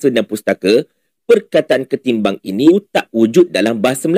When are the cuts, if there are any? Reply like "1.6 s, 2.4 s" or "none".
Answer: 2.7 s

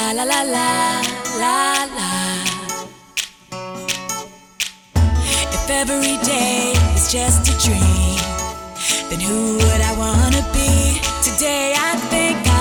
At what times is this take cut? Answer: none

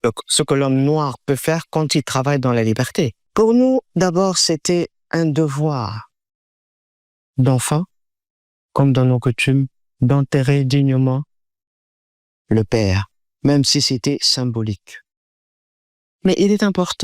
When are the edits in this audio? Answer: 3.2 s

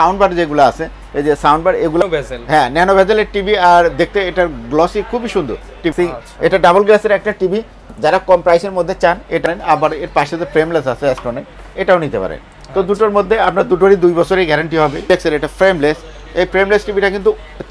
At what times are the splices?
2.0 s, 5.9 s, 9.5 s, 15.1 s

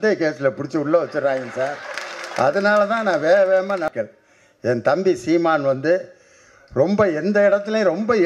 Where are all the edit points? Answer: 3.9 s

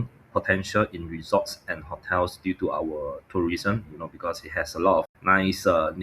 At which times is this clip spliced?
5.1 s

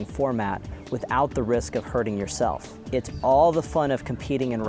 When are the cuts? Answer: 2.7 s

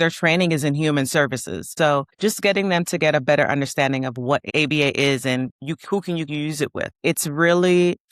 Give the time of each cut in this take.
1.6 s, 4.5 s, 5.6 s, 6.9 s

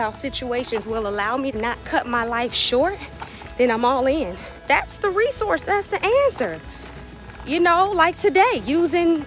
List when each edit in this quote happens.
1.5 s, 4.5 s

